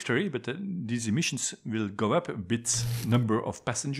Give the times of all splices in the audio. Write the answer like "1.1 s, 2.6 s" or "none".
2.9 s